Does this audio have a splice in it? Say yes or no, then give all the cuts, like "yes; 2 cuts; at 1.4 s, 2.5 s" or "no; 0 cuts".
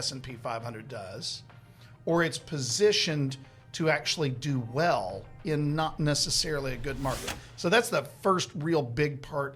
no; 0 cuts